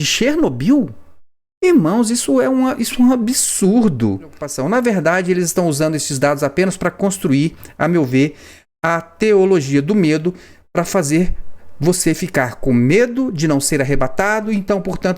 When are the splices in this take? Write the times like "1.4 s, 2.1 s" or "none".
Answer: 4.5 s

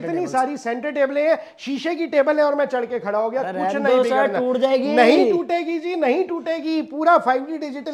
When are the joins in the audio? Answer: none

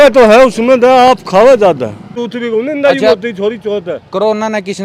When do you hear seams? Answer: 2.2 s

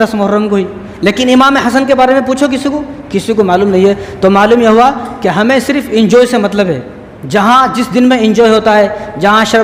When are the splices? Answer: none

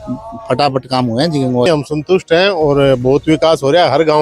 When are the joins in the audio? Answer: 1.7 s

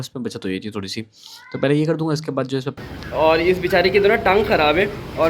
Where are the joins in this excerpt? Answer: 2.8 s

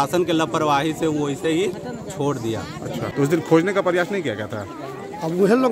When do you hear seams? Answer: 3.1 s

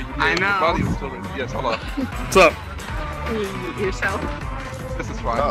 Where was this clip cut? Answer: 2.2 s

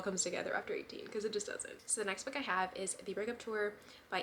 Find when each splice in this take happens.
none

